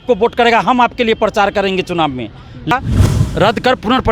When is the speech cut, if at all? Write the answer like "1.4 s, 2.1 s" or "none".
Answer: 2.7 s

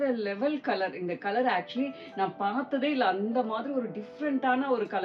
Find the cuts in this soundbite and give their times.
none

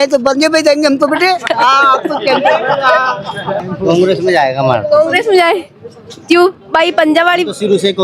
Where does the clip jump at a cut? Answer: none

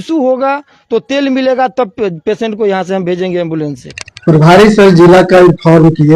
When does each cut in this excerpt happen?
3.9 s

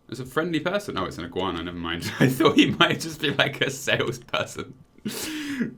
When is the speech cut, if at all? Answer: none

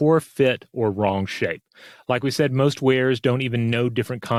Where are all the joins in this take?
none

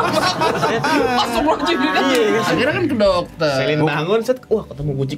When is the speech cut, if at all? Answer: 2.5 s

